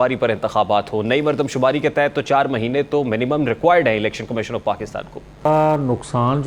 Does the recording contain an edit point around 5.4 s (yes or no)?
yes